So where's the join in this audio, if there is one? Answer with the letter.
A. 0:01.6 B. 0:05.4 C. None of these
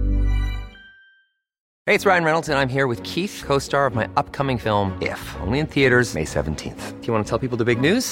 A